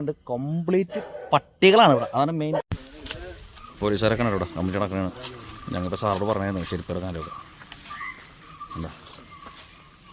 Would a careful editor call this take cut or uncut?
cut